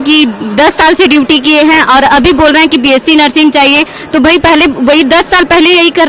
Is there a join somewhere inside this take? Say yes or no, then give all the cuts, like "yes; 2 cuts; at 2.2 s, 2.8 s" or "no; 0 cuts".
no; 0 cuts